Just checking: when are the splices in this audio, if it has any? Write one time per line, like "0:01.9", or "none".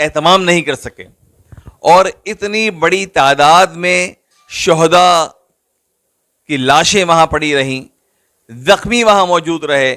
none